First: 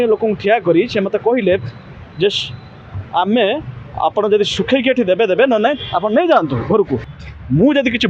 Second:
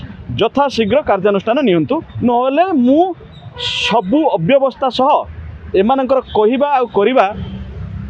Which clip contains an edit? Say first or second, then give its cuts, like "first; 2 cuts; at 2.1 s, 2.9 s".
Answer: first; 1 cut; at 7.1 s